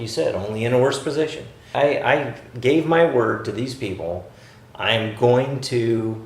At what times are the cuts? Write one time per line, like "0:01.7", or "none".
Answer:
0:01.7